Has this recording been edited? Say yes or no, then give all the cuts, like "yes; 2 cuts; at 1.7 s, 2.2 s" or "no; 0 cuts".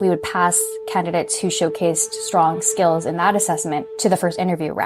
yes; 1 cut; at 3.9 s